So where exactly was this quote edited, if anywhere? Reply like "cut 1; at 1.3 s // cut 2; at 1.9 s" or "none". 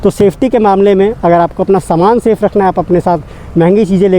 none